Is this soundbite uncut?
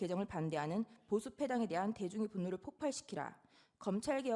yes; 0 cuts

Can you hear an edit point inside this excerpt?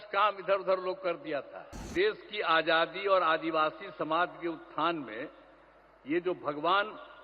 yes; 1 cut; at 1.9 s

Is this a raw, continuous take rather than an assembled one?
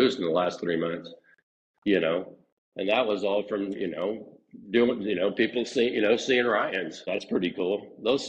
no; 1 cut; at 6.9 s

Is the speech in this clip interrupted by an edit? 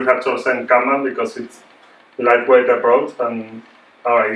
yes; 1 cut; at 2.0 s

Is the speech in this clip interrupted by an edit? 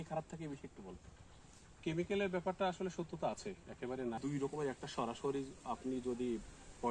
yes; 1 cut; at 4.2 s

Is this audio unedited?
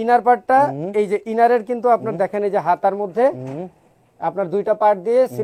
yes; 0 cuts

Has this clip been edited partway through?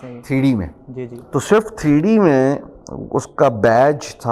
no; 0 cuts

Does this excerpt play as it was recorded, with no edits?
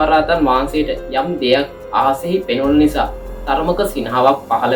yes; 0 cuts

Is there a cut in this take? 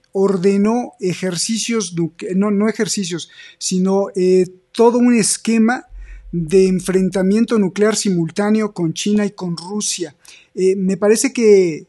no; 0 cuts

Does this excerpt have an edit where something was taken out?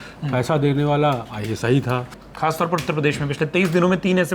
yes; 1 cut; at 2.2 s

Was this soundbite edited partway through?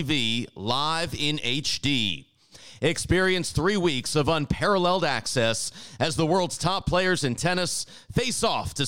no; 0 cuts

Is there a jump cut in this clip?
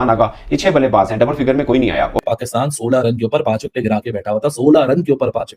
yes; 1 cut; at 2.2 s

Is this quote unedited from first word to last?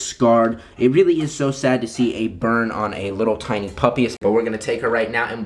no; 1 cut; at 4.2 s

